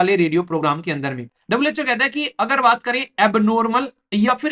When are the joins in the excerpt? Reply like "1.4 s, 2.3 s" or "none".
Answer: 1.3 s